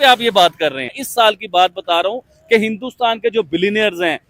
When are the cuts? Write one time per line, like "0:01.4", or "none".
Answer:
0:01.0

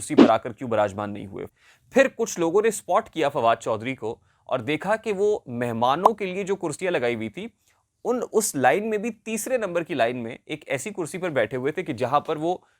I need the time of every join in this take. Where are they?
0:01.4

